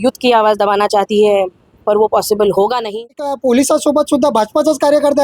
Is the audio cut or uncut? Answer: cut